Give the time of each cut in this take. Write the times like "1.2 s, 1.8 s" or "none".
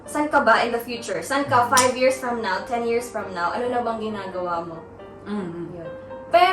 none